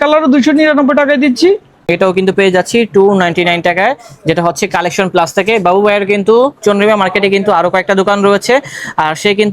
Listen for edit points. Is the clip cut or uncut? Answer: cut